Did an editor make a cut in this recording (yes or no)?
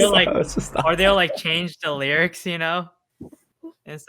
no